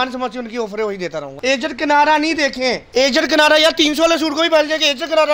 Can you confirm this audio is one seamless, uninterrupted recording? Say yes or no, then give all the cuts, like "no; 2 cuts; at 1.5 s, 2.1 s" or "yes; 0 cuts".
no; 2 cuts; at 1.4 s, 2.8 s